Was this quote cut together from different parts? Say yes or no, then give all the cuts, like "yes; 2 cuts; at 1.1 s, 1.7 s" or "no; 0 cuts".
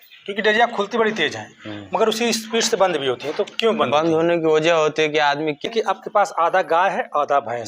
yes; 1 cut; at 5.7 s